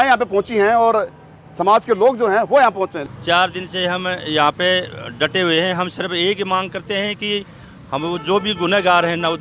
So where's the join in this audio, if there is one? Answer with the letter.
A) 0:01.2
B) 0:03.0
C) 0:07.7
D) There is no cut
B